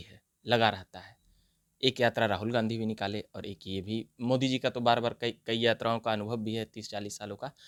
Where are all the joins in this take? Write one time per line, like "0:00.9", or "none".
none